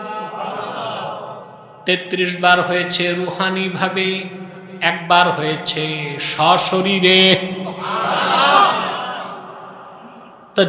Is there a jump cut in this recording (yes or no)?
no